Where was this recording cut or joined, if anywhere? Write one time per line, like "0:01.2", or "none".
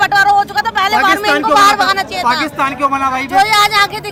none